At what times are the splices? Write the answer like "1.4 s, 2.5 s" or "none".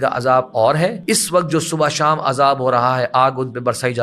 1.0 s